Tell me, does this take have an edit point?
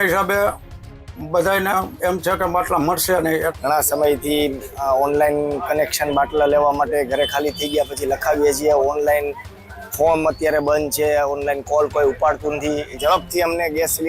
yes; 2 cuts; at 3.5 s, 12.9 s

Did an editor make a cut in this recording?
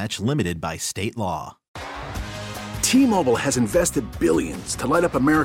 yes; 1 cut; at 1.6 s

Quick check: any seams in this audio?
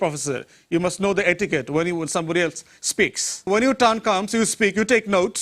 yes; 1 cut; at 3.5 s

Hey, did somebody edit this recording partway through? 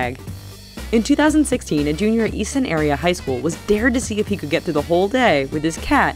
no; 0 cuts

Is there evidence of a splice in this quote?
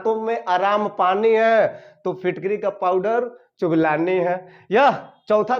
no; 0 cuts

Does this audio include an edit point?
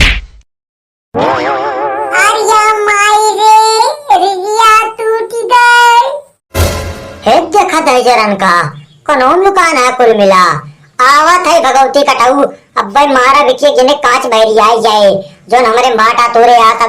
yes; 1 cut; at 6.6 s

